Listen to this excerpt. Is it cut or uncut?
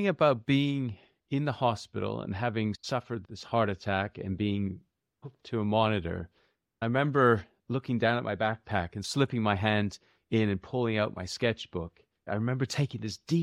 cut